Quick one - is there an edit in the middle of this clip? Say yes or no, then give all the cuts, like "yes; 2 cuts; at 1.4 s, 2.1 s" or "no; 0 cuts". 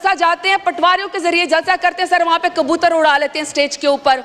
no; 0 cuts